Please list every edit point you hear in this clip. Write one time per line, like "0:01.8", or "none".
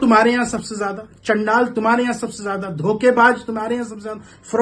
none